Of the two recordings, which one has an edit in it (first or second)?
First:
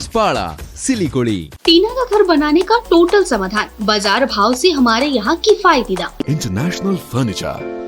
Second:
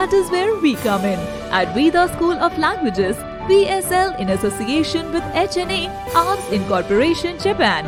first